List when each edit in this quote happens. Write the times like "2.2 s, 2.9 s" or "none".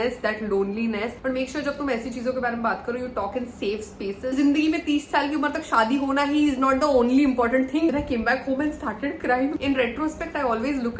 1.1 s, 4.3 s, 7.9 s, 9.6 s